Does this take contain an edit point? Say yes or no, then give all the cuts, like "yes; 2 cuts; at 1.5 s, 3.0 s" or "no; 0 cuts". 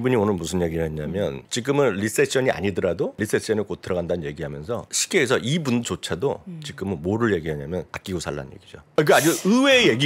yes; 4 cuts; at 1.5 s, 3.2 s, 4.9 s, 8.4 s